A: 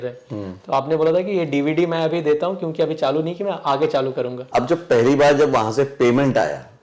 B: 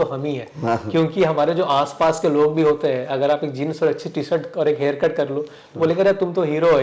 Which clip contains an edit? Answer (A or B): A